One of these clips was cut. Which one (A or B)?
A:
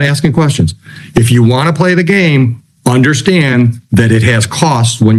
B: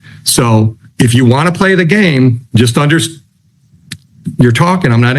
B